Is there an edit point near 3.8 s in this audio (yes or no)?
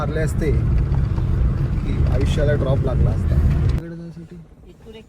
yes